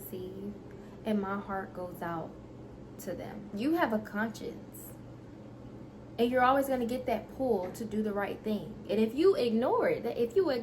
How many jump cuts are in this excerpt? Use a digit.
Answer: 1